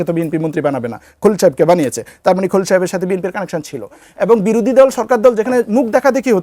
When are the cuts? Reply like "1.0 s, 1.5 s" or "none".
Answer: 4.1 s